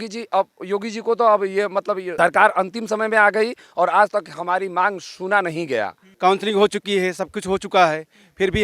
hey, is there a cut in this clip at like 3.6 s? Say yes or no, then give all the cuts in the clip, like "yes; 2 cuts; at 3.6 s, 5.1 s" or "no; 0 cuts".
no; 2 cuts; at 2.1 s, 6.0 s